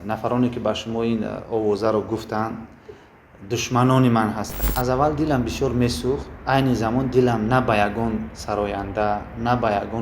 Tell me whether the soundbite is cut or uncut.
cut